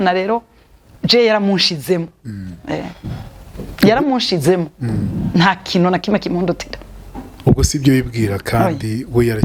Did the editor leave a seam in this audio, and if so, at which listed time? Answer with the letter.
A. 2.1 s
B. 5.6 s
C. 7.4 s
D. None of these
D